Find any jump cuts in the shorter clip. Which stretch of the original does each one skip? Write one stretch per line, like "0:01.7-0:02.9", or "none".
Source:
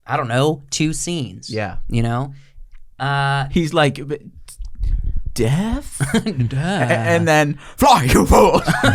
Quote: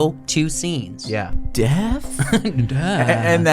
0:01.8-0:05.2